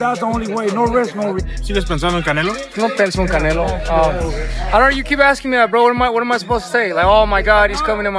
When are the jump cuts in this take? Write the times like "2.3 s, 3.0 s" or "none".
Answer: 1.4 s